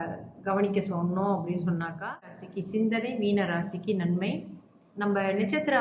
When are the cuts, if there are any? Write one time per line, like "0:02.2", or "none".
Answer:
0:02.5